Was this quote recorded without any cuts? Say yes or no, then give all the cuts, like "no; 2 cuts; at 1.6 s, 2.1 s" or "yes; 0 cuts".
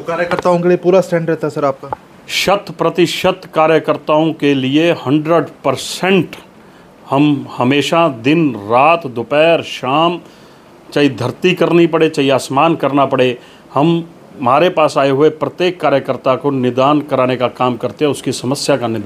yes; 0 cuts